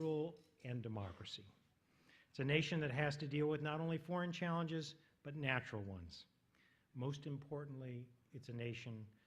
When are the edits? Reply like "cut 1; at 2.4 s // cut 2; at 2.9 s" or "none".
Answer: none